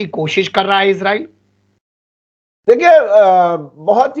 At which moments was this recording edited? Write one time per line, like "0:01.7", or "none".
none

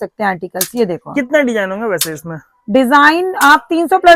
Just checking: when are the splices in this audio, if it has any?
none

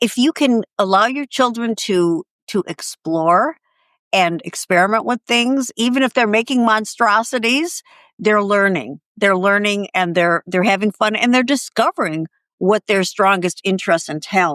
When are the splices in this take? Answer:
none

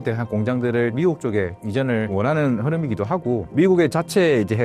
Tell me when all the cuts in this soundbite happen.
0:00.9
0:02.1

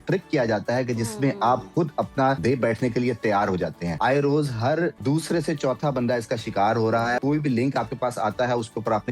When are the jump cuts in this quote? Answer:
0:02.4
0:03.9
0:05.0
0:07.2

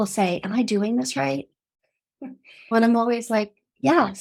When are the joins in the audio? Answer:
none

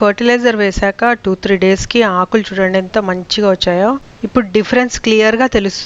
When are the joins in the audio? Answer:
0:04.1

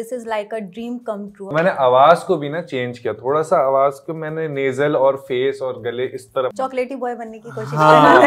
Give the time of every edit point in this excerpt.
0:01.5
0:06.5

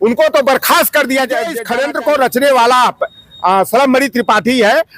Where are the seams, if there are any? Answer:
0:01.6

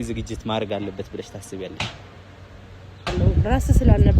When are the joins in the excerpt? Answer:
0:03.1

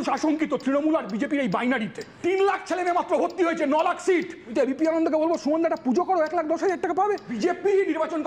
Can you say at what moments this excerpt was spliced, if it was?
0:02.1
0:04.5
0:07.4

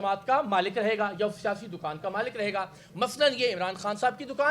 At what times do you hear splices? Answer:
none

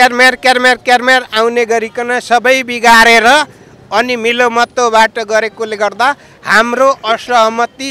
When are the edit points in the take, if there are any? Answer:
none

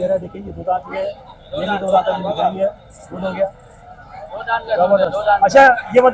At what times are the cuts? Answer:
none

